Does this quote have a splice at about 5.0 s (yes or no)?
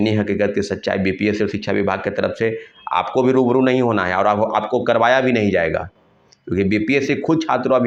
no